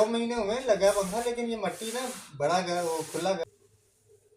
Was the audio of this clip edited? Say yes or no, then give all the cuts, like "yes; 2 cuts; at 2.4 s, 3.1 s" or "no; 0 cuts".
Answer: yes; 1 cut; at 3.4 s